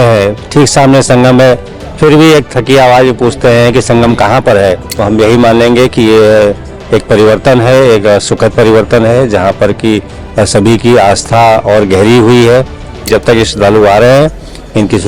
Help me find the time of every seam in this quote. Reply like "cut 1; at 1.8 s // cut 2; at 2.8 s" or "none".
cut 1; at 4.9 s // cut 2; at 13.1 s